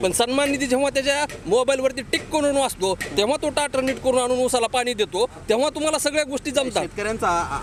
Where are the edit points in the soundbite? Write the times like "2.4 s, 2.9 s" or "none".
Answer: none